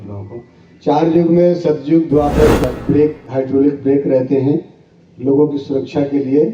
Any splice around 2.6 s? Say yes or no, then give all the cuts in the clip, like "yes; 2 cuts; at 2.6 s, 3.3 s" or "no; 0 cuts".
yes; 1 cut; at 2.6 s